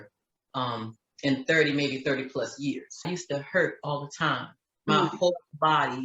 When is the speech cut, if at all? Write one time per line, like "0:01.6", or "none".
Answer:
0:03.1